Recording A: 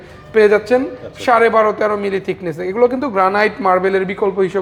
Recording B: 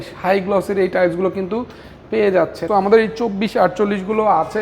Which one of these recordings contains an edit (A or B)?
B